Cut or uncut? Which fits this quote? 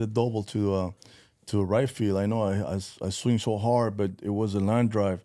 uncut